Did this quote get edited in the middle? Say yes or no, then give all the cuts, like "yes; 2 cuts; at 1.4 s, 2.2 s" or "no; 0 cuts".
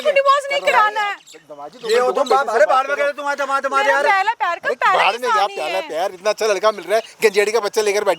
no; 0 cuts